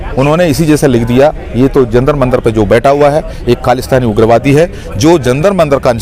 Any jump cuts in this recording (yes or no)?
no